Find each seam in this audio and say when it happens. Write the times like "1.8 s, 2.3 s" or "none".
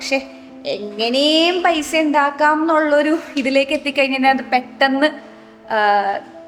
none

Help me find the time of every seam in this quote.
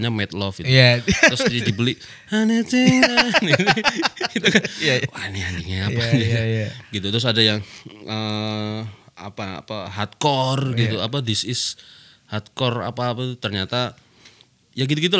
none

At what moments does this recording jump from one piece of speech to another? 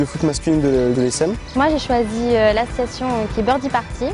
1.2 s

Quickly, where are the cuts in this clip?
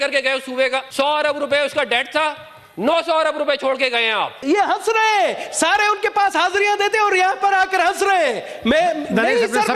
0.9 s, 4.4 s

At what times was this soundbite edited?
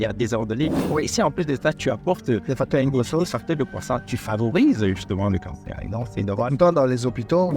none

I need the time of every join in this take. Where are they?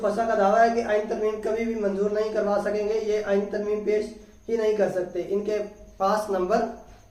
none

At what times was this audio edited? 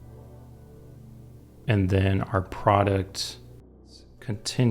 3.7 s

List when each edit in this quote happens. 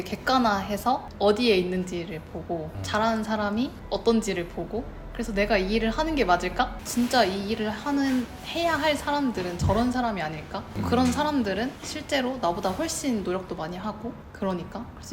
1.1 s, 6.8 s

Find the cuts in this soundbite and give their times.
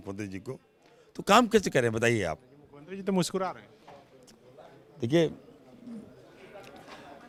none

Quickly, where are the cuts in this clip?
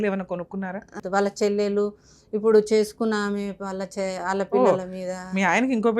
1.0 s

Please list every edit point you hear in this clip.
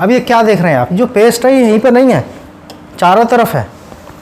none

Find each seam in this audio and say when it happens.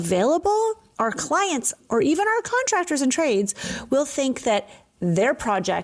1.8 s

